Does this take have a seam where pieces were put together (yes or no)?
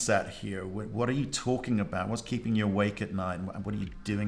no